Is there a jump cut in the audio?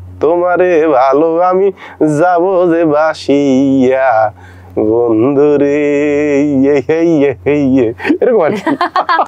no; 0 cuts

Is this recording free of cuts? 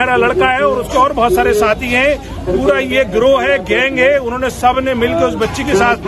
yes; 0 cuts

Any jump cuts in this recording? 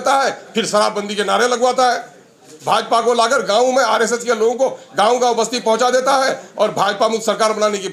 no; 0 cuts

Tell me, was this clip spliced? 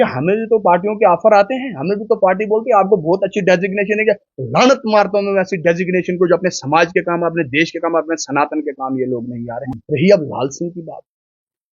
yes; 1 cut; at 9.7 s

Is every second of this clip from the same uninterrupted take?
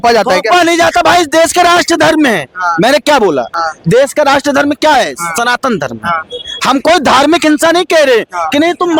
yes; 0 cuts

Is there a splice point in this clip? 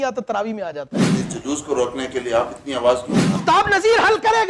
yes; 2 cuts; at 1.1 s, 3.4 s

